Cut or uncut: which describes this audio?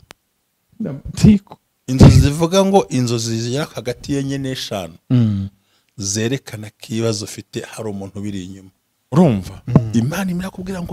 cut